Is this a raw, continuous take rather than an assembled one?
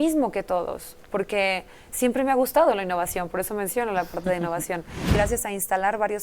no; 1 cut; at 5.2 s

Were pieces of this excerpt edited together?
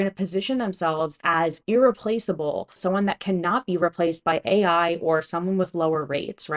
no; 0 cuts

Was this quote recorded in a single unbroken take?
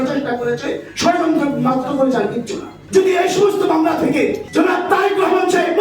no; 2 cuts; at 2.8 s, 4.4 s

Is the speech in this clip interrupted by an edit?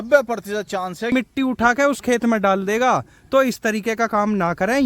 yes; 1 cut; at 1.1 s

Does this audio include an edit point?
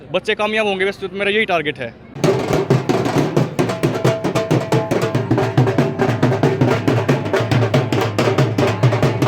no; 0 cuts

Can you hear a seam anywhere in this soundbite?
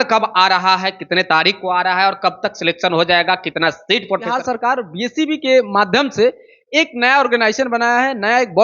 yes; 1 cut; at 4.4 s

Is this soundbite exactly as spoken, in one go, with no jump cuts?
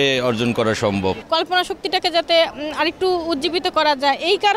no; 1 cut; at 1.2 s

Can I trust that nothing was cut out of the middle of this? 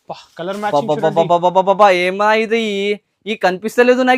yes; 0 cuts

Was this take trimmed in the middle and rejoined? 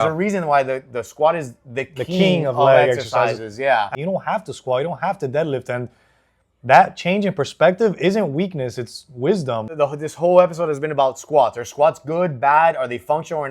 yes; 2 cuts; at 3.9 s, 9.6 s

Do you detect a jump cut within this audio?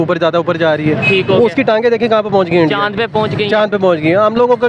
no; 0 cuts

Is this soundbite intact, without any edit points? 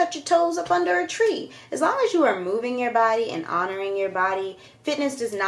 yes; 0 cuts

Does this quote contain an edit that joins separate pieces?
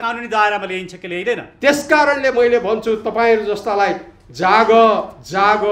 yes; 1 cut; at 1.5 s

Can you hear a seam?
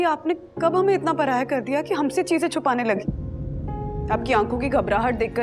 yes; 1 cut; at 4.0 s

